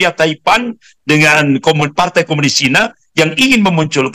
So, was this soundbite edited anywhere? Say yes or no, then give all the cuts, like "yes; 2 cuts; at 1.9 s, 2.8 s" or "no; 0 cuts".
no; 0 cuts